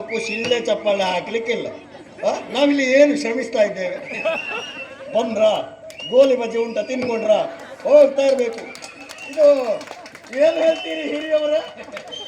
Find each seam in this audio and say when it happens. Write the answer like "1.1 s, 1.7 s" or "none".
none